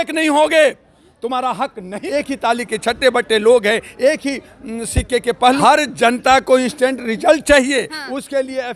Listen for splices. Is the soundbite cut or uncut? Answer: cut